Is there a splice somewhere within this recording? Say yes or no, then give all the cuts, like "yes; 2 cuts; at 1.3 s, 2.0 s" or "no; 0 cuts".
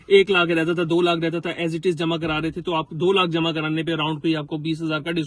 no; 0 cuts